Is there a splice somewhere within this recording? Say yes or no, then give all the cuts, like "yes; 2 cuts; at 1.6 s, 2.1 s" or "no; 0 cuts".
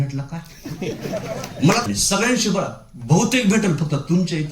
yes; 1 cut; at 1.8 s